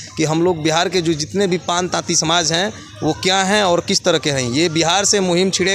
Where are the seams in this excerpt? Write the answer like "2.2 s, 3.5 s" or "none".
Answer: none